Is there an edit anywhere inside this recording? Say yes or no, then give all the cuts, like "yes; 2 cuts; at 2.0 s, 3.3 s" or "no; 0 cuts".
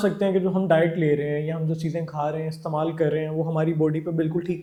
no; 0 cuts